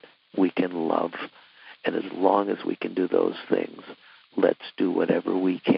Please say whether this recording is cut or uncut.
uncut